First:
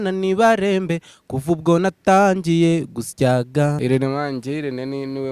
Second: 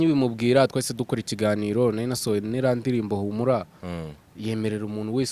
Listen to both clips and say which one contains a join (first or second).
first